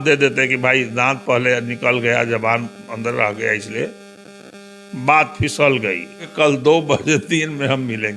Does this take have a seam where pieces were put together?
yes; 1 cut; at 6.3 s

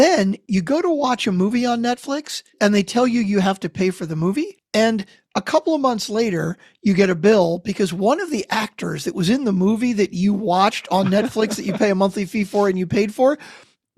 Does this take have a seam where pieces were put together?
yes; 2 cuts; at 2.5 s, 4.6 s

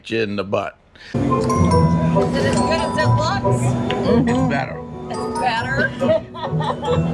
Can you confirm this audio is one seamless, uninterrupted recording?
no; 1 cut; at 1.1 s

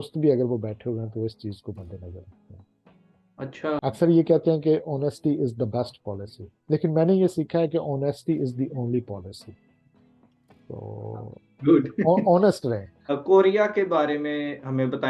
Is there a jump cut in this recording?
yes; 2 cuts; at 3.8 s, 13.1 s

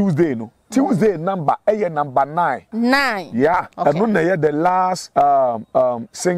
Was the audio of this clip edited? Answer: yes; 3 cuts; at 2.6 s, 3.7 s, 5.0 s

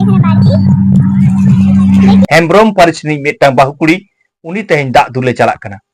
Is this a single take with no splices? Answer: no; 1 cut; at 2.1 s

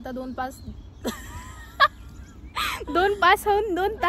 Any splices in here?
yes; 1 cut; at 1.7 s

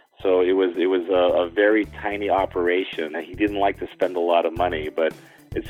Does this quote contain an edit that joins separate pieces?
yes; 1 cut; at 3.2 s

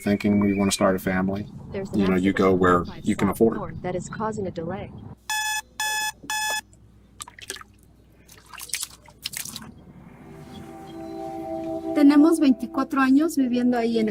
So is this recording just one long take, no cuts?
yes; 0 cuts

